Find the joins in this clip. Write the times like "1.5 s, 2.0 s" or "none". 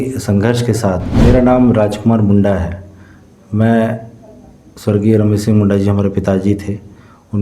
1.1 s